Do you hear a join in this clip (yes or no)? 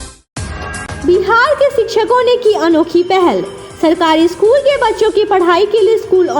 no